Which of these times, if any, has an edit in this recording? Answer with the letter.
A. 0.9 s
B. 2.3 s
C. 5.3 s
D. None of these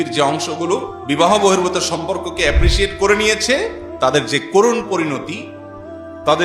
A